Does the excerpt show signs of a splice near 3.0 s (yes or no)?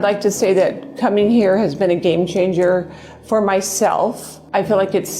no